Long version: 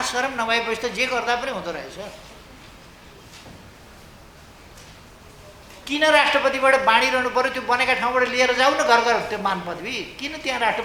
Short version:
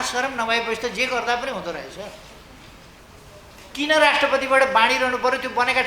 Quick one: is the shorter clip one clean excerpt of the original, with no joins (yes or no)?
no